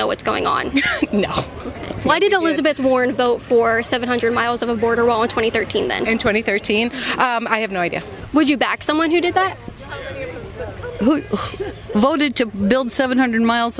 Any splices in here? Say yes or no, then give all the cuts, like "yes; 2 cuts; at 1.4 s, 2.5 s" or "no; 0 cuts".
yes; 1 cut; at 8.1 s